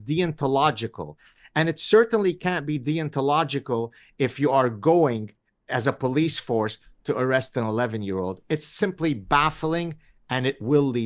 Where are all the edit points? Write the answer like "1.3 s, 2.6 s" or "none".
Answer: none